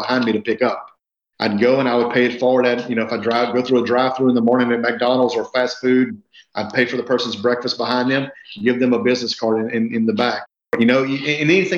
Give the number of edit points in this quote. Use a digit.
1